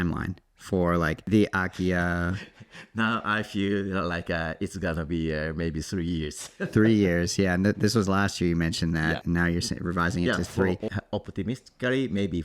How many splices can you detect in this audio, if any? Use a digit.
3